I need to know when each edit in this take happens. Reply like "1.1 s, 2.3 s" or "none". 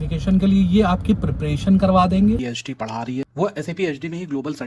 2.6 s